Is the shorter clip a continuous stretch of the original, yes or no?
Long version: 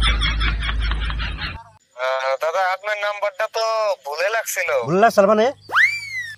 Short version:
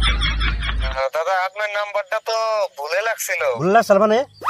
no